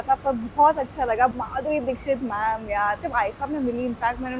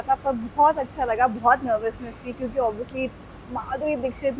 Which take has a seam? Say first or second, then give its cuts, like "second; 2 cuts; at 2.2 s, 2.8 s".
first; 2 cuts; at 1.4 s, 3.0 s